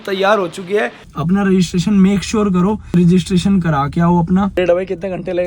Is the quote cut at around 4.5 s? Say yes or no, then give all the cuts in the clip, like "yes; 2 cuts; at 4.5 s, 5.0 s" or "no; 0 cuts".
yes; 2 cuts; at 1.0 s, 4.5 s